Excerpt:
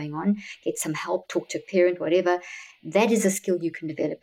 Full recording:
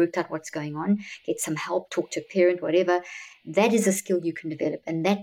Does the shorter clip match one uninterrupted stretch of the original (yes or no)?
yes